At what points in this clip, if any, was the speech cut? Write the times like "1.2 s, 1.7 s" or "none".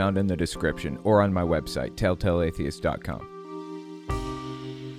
3.4 s

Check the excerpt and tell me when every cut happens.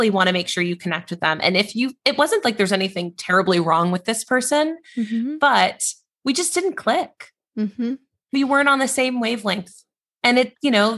none

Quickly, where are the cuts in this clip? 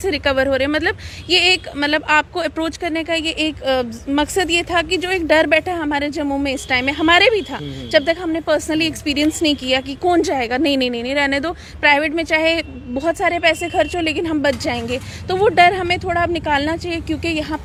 none

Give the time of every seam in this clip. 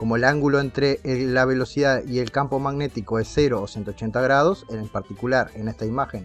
none

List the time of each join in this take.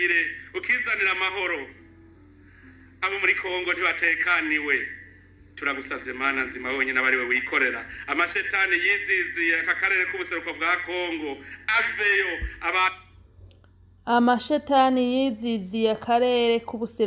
none

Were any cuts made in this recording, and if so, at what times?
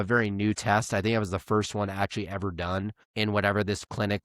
3.0 s

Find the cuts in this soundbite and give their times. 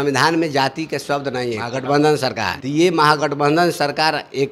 1.7 s, 2.5 s

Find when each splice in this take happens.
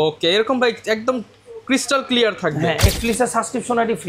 2.9 s

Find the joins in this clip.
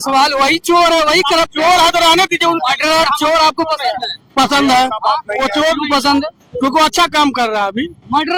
none

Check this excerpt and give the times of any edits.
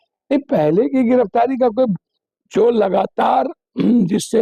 none

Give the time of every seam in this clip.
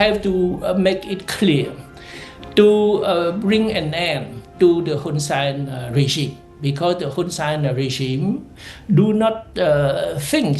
none

